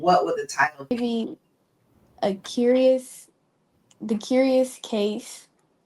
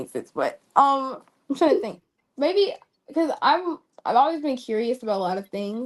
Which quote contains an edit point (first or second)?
first